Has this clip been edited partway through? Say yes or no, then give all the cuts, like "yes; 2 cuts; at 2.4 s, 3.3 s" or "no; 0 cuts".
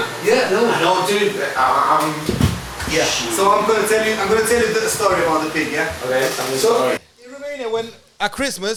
no; 0 cuts